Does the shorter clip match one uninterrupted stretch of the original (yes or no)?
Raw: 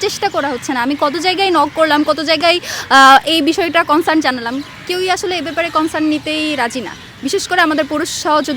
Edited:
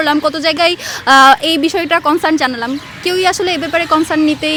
yes